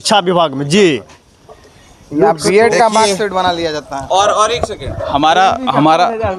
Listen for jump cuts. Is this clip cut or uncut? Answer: uncut